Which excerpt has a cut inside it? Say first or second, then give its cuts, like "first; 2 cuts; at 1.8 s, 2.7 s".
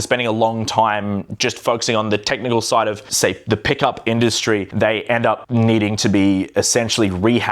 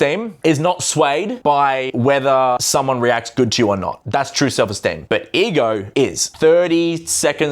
second; 5 cuts; at 1.6 s, 2.6 s, 4.0 s, 5.0 s, 6.0 s